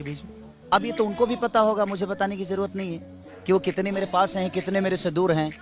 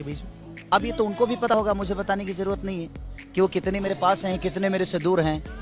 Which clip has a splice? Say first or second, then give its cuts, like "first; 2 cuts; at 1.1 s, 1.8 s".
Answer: second; 1 cut; at 1.5 s